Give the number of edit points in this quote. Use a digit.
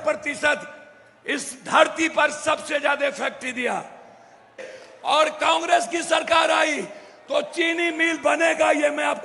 1